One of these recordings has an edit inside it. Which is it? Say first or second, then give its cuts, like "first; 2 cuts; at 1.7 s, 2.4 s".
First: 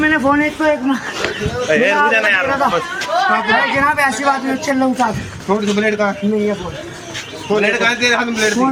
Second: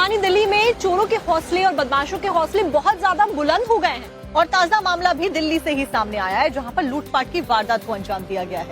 second; 1 cut; at 2.1 s